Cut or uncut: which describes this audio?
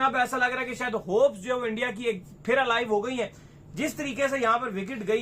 uncut